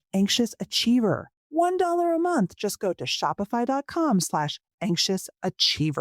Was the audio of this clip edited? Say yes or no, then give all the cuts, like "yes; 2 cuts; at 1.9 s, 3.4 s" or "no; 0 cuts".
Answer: yes; 1 cut; at 1.3 s